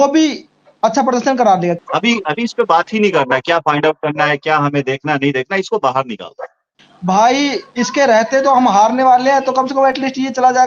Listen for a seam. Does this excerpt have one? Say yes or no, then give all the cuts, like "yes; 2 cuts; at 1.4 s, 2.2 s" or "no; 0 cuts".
yes; 2 cuts; at 1.8 s, 6.7 s